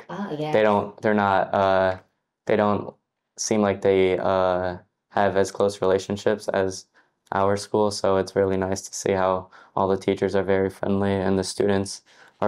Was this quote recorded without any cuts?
yes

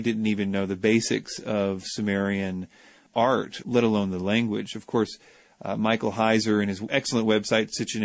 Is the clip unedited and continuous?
yes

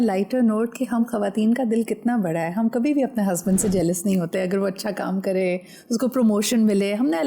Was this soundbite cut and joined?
no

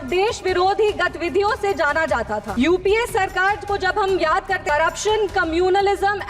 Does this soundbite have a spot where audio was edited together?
yes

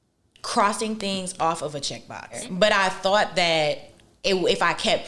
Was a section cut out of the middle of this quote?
yes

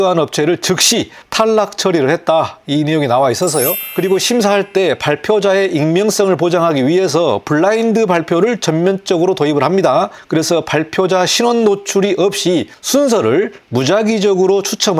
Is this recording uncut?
no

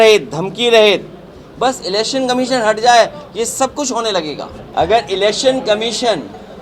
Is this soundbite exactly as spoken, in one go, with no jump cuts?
no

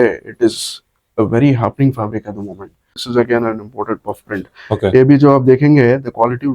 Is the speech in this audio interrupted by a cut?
yes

